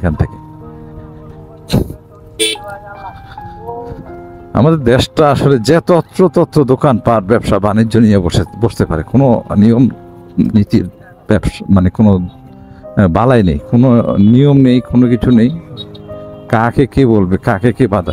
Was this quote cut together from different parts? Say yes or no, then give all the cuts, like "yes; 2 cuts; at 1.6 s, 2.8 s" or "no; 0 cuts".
no; 0 cuts